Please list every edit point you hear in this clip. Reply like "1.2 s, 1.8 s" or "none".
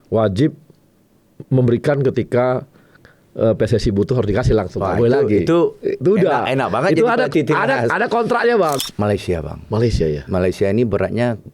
8.8 s